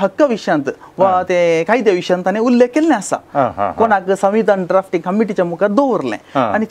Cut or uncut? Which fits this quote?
uncut